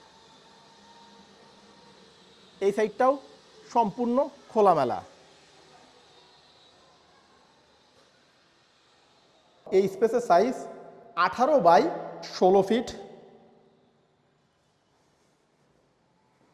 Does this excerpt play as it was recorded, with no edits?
no; 1 cut; at 9.6 s

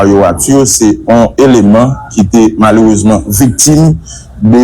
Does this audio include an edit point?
yes; 2 cuts; at 1.0 s, 3.6 s

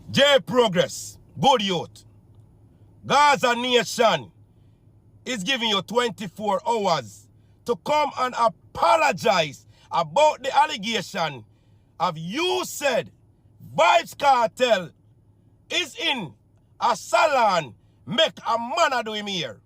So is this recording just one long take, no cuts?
yes; 0 cuts

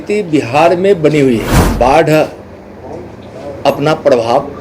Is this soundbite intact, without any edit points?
no; 1 cut; at 1.6 s

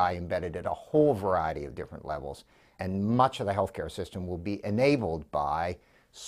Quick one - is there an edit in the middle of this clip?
yes; 1 cut; at 2.7 s

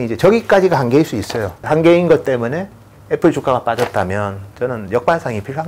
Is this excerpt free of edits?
yes; 0 cuts

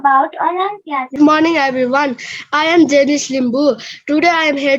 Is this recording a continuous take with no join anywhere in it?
no; 1 cut; at 1.1 s

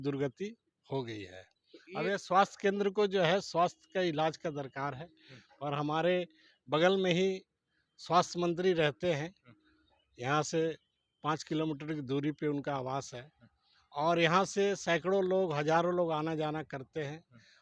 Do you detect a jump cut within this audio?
no; 0 cuts

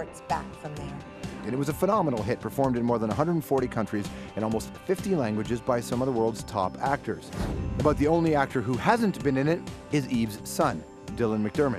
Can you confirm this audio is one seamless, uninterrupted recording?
no; 1 cut; at 1.8 s

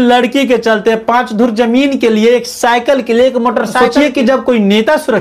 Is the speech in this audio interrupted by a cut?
yes; 1 cut; at 3.7 s

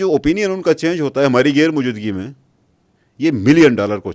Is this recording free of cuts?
yes; 0 cuts

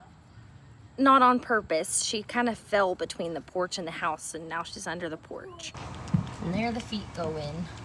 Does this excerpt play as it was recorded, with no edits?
no; 1 cut; at 5.7 s

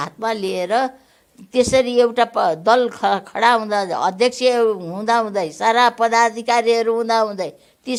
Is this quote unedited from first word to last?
yes; 0 cuts

